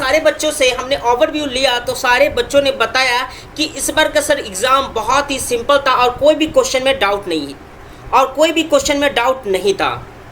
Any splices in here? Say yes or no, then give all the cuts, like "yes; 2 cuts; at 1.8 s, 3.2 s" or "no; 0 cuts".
no; 0 cuts